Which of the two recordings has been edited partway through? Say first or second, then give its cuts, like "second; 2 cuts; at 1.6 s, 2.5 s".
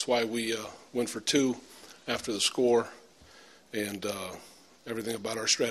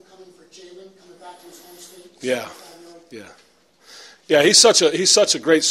second; 1 cut; at 2.6 s